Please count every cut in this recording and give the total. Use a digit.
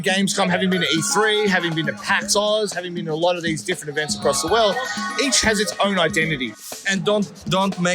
1